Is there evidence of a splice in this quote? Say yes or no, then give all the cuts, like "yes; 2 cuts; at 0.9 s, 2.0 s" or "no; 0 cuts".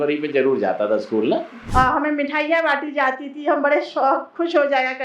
yes; 1 cut; at 1.7 s